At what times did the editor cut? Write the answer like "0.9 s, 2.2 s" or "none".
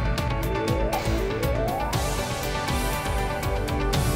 none